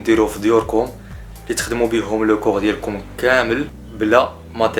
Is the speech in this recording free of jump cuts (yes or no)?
no